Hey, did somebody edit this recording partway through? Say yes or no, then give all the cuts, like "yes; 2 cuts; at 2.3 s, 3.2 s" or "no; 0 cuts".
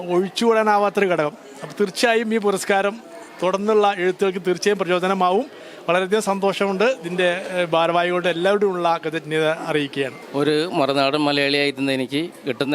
no; 0 cuts